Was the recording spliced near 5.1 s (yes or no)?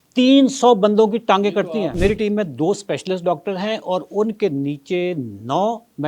no